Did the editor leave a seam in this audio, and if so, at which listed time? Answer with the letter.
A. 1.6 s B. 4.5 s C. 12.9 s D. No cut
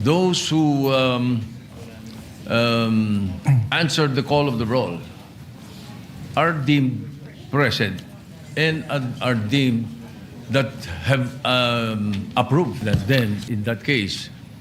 C